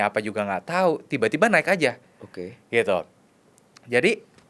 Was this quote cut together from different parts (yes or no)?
no